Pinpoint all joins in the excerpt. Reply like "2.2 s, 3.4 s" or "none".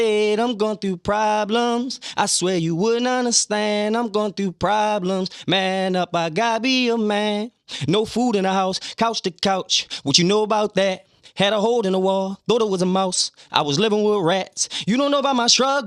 none